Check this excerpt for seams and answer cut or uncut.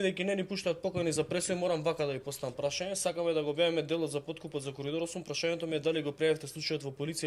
uncut